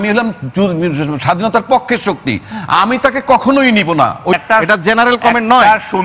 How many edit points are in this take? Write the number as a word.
one